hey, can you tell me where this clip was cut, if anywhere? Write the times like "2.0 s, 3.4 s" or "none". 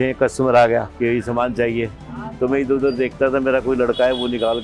0.9 s